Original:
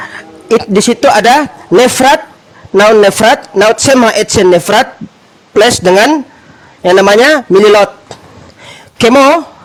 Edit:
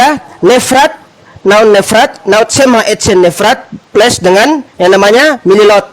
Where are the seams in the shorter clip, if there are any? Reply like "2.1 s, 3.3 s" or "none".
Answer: 3.7 s, 4.7 s